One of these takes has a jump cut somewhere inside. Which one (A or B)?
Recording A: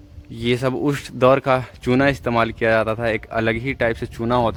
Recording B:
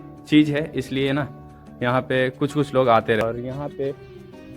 B